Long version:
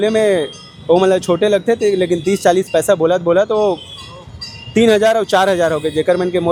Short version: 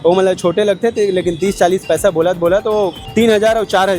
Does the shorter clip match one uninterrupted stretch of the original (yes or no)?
no